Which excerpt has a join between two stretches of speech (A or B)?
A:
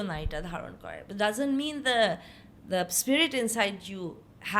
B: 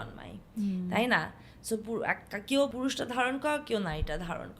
B